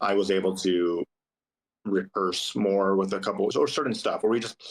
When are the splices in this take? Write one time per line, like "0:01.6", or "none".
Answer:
0:03.5